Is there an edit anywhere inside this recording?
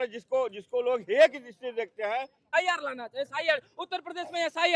yes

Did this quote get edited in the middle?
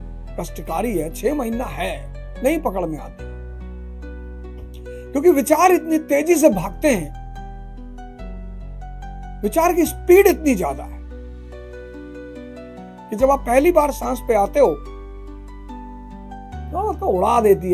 yes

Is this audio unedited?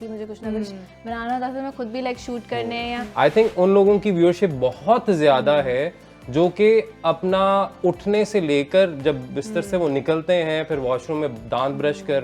no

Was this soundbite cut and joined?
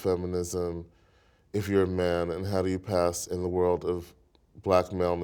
no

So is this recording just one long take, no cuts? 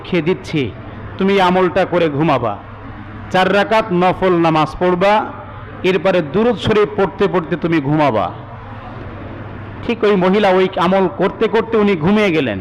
yes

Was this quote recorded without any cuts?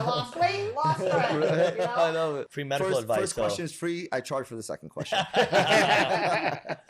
no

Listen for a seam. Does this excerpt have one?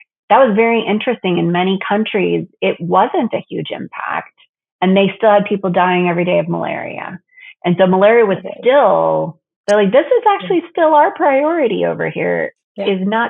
no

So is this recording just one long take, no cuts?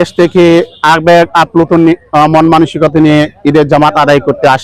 yes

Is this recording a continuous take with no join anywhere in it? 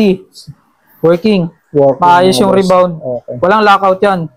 yes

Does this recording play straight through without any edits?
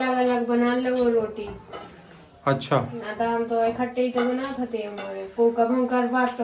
yes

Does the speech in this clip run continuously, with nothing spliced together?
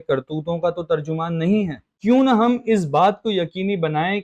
no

